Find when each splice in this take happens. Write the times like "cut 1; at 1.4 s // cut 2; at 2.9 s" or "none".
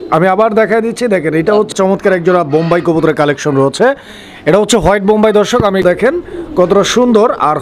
cut 1; at 1.7 s // cut 2; at 5.8 s